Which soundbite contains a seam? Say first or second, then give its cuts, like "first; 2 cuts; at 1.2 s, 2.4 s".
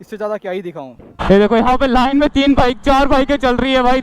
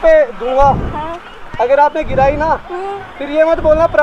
first; 1 cut; at 1.2 s